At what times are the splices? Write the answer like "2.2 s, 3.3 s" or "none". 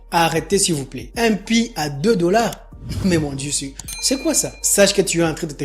1.0 s, 4.6 s